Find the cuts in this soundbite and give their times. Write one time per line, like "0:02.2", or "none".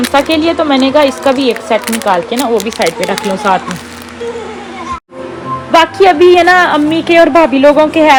none